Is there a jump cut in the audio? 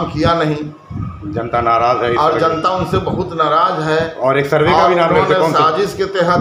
no; 0 cuts

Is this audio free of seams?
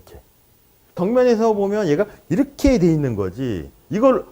no; 1 cut; at 1.0 s

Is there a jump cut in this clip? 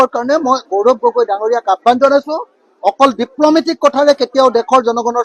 no; 0 cuts

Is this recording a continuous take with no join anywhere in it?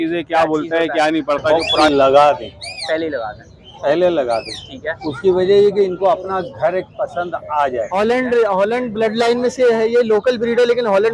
no; 2 cuts; at 1.7 s, 7.9 s

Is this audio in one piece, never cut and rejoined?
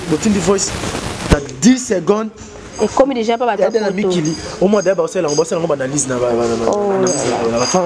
yes; 0 cuts

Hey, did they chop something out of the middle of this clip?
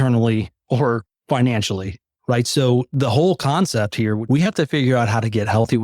yes; 1 cut; at 4.2 s

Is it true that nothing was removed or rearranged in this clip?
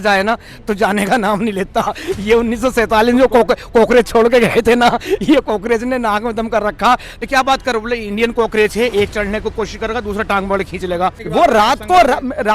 no; 2 cuts; at 7.2 s, 11.2 s

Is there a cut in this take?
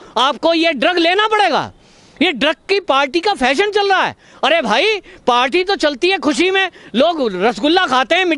no; 0 cuts

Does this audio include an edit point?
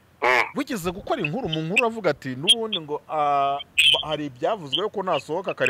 no; 0 cuts

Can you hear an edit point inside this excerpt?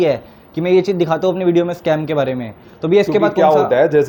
no; 0 cuts

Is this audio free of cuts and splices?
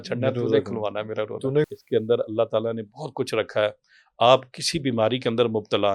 no; 1 cut; at 1.7 s

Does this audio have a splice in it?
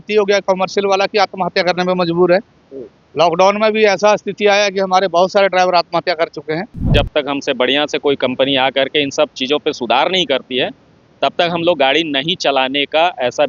yes; 1 cut; at 6.9 s

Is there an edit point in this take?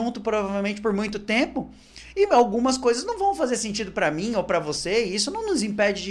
no; 0 cuts

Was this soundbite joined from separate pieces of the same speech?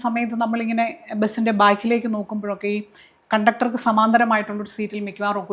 no; 0 cuts

